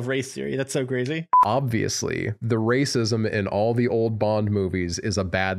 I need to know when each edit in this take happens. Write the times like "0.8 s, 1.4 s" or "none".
1.3 s